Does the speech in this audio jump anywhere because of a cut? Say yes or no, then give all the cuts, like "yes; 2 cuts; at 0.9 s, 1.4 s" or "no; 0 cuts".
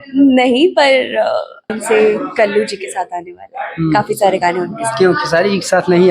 yes; 1 cut; at 1.8 s